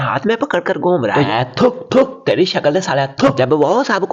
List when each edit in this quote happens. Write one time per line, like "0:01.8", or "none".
0:01.3